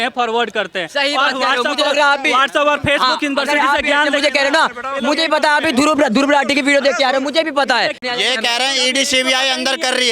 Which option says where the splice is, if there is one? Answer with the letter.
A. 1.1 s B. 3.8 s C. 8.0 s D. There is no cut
C